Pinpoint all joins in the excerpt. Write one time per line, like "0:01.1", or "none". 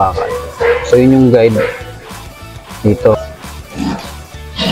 0:03.2